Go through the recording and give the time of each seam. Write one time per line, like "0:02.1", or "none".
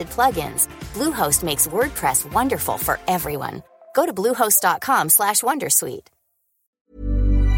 0:06.6